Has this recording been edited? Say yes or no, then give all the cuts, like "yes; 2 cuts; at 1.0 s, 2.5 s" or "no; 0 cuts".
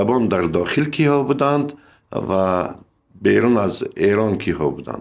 no; 0 cuts